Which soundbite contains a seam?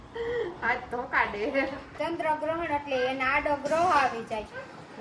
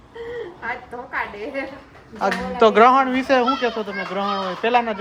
first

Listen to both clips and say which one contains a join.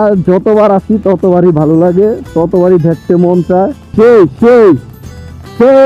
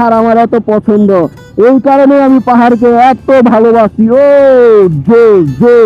first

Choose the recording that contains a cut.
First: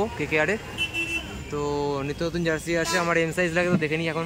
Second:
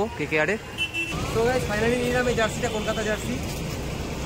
second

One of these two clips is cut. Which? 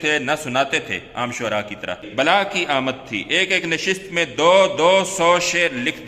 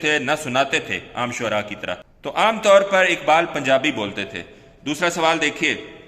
first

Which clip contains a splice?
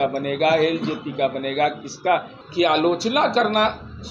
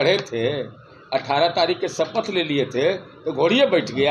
first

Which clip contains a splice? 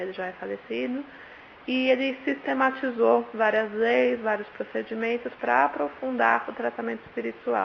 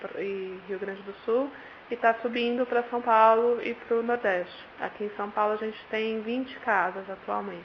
second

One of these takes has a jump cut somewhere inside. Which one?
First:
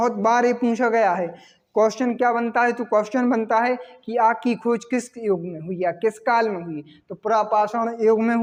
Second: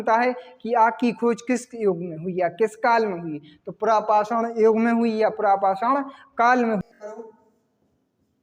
second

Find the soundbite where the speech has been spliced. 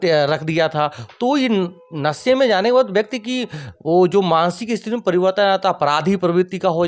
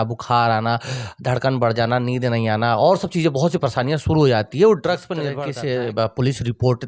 second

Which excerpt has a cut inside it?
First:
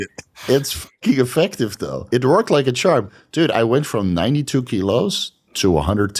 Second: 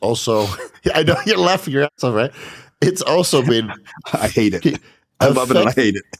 first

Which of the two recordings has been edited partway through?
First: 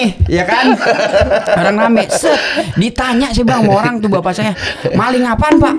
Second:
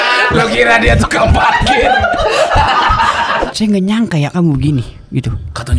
second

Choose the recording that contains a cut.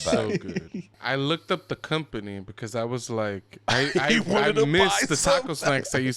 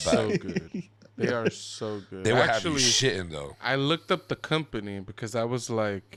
first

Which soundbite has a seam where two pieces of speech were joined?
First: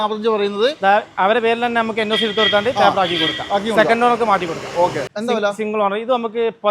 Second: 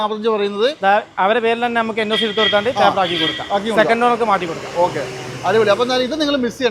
first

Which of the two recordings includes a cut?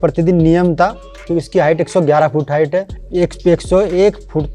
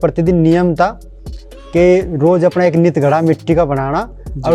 first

